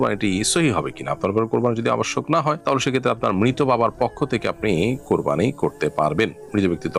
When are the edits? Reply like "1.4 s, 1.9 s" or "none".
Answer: none

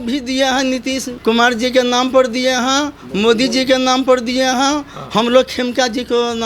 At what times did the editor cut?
1.1 s

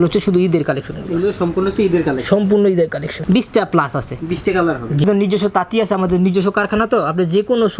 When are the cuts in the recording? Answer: 3.1 s, 5.0 s

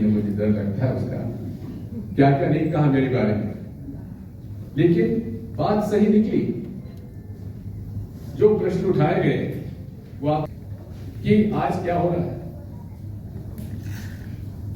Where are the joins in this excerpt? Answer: 10.5 s

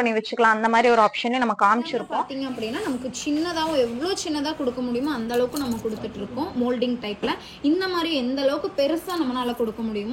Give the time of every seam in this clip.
2.1 s

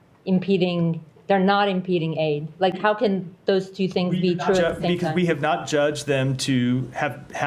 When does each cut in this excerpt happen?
none

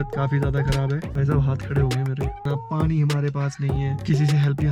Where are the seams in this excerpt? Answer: 1.0 s

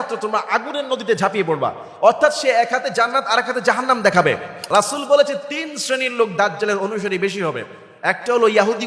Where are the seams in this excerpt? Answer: 4.6 s

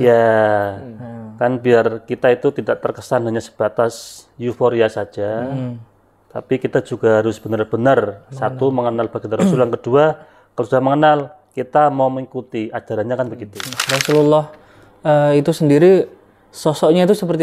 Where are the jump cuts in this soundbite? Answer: 13.7 s

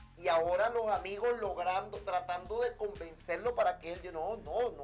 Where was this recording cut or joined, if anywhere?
none

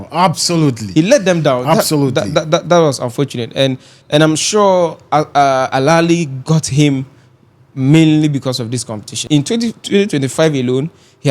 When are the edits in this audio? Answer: 3.9 s, 9.2 s

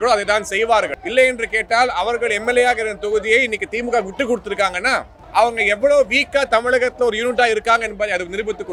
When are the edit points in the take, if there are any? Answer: none

